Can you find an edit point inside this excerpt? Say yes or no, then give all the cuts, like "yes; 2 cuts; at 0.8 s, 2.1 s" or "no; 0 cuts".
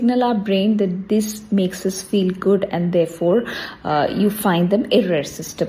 no; 0 cuts